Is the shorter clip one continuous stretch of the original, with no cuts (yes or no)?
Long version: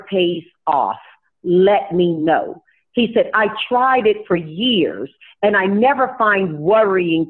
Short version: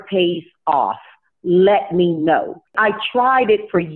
no